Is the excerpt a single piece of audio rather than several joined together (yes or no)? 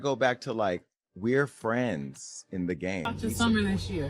no